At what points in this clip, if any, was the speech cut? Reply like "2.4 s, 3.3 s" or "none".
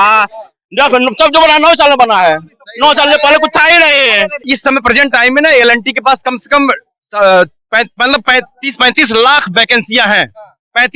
4.5 s